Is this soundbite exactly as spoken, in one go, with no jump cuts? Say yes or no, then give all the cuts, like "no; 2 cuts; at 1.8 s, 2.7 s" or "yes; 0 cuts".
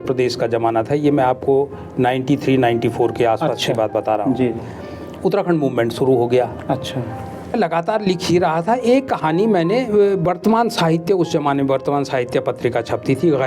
no; 1 cut; at 7.5 s